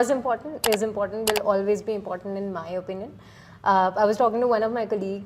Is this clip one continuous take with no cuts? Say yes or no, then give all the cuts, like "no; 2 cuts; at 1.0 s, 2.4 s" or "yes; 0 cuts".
yes; 0 cuts